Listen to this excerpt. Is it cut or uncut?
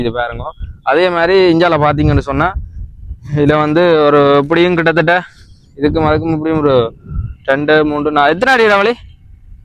uncut